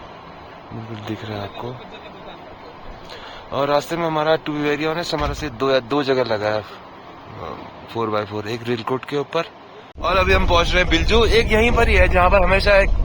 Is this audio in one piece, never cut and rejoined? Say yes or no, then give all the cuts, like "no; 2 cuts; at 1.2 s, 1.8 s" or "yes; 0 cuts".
no; 1 cut; at 9.9 s